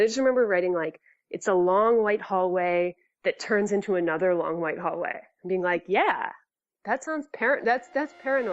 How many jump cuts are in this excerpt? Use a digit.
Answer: 1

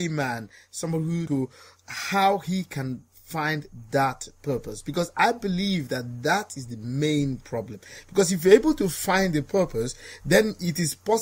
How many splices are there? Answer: 1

